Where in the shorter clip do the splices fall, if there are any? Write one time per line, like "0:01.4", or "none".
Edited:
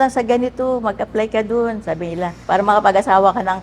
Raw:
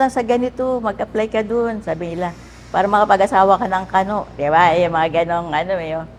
0:02.4